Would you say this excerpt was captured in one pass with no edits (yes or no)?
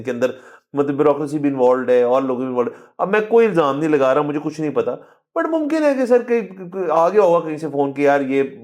yes